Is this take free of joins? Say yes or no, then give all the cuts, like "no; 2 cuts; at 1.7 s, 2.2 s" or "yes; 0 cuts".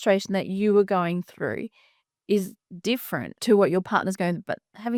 yes; 0 cuts